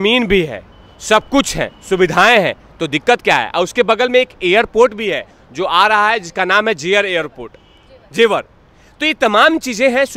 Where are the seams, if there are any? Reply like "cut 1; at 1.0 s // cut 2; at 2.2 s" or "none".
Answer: none

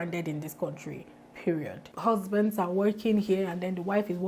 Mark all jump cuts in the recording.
cut 1; at 1.8 s

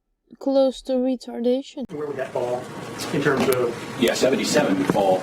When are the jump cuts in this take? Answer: cut 1; at 2.2 s

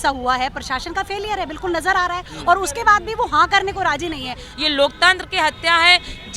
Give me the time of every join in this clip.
cut 1; at 4.4 s

